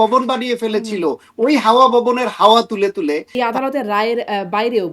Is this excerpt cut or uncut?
cut